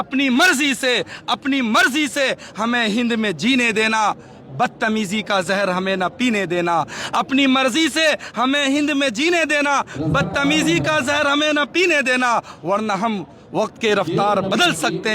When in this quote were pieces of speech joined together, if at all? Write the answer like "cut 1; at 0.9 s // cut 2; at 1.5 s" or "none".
none